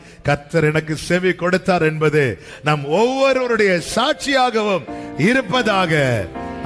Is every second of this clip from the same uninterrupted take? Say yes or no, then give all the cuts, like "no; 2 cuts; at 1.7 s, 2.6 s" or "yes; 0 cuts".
yes; 0 cuts